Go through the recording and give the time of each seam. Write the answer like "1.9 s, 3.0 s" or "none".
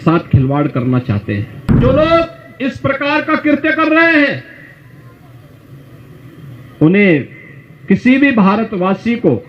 1.7 s